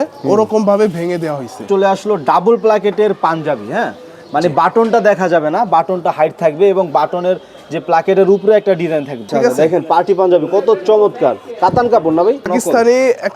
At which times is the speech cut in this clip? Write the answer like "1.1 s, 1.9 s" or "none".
1.7 s, 9.2 s, 12.4 s